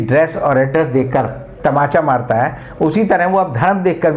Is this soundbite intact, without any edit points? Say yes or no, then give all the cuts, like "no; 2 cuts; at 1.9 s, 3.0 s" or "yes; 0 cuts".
yes; 0 cuts